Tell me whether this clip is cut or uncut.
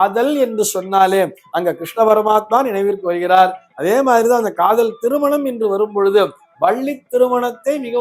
uncut